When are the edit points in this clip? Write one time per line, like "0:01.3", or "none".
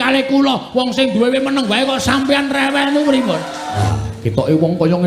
0:03.9